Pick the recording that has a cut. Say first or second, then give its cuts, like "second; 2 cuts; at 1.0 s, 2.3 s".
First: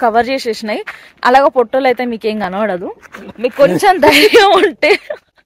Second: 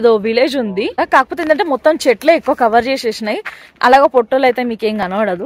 second; 1 cut; at 0.9 s